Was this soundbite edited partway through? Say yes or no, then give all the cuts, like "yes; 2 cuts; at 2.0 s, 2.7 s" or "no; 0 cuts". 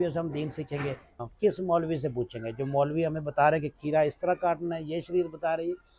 yes; 1 cut; at 1.2 s